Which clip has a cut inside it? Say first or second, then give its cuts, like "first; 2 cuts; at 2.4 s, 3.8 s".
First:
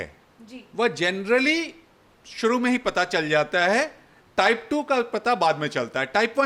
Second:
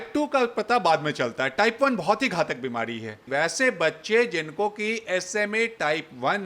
second; 1 cut; at 3.2 s